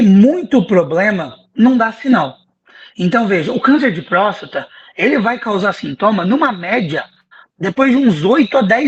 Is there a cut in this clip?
no; 0 cuts

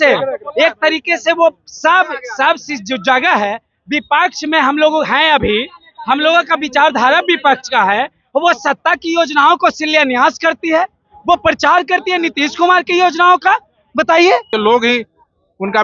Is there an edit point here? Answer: yes; 1 cut; at 14.5 s

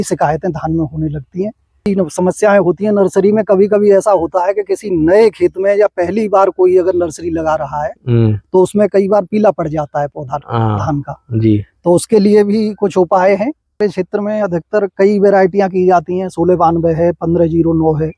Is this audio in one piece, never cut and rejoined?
no; 2 cuts; at 1.9 s, 13.8 s

